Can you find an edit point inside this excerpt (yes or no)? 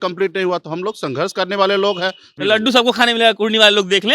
yes